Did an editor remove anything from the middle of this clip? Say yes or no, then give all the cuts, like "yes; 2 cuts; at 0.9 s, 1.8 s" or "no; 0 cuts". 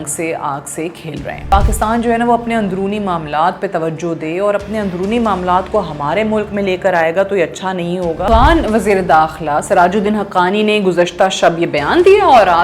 yes; 2 cuts; at 1.5 s, 8.3 s